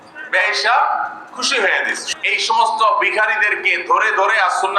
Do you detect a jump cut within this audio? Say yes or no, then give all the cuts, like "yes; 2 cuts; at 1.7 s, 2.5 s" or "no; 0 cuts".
yes; 1 cut; at 2.1 s